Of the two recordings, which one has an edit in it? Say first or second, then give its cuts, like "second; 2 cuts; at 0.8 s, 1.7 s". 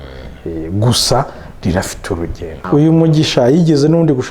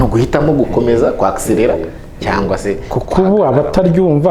first; 1 cut; at 2.6 s